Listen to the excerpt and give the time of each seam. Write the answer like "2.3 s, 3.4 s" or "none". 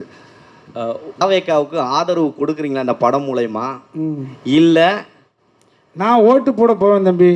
1.2 s